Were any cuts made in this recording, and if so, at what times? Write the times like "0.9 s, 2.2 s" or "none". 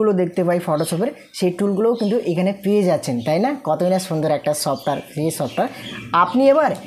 none